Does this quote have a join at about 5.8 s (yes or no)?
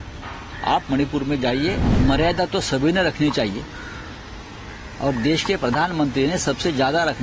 no